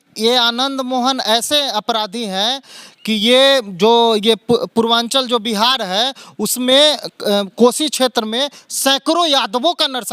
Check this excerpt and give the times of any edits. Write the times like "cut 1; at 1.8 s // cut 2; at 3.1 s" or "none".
none